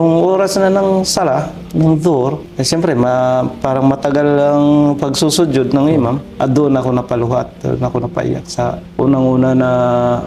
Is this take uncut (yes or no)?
yes